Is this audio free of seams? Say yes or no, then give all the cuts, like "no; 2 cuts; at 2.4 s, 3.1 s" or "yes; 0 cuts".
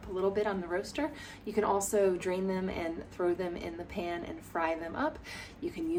yes; 0 cuts